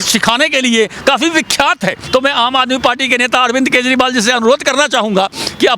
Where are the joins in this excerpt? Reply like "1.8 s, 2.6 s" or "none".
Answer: 2.0 s